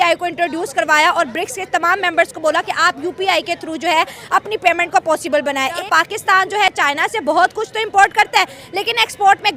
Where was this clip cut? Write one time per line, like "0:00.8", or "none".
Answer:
0:05.8